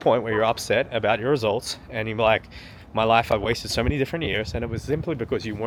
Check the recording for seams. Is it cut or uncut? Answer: uncut